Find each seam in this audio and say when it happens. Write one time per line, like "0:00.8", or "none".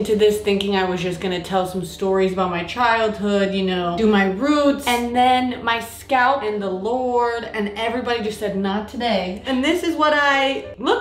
0:04.8
0:09.4